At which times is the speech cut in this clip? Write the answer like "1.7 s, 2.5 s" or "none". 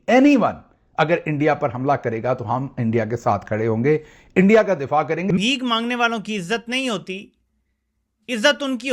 5.2 s

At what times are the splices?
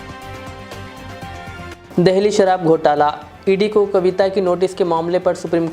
1.7 s

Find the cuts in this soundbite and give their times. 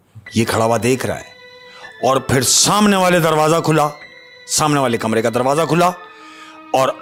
none

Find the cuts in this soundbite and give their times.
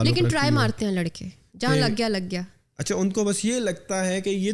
none

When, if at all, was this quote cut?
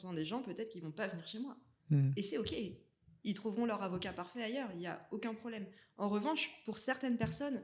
none

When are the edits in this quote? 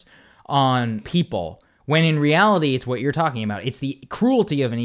1.0 s

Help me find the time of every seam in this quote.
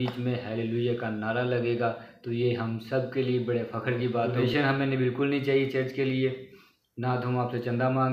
4.3 s

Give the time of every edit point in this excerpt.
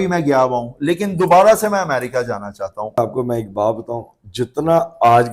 3.0 s

